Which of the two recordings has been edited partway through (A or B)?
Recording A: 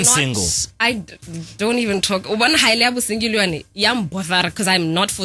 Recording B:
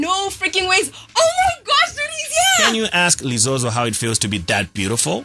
B